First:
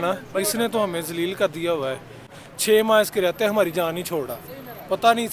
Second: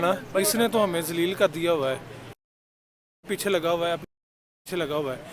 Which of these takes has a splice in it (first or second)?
first